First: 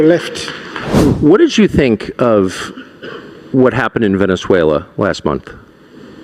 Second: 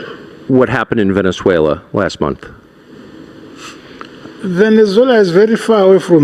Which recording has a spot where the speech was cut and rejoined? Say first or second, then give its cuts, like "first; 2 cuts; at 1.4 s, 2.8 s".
first; 1 cut; at 1.0 s